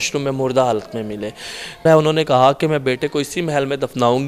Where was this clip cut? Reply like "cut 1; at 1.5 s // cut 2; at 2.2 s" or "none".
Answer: cut 1; at 1.9 s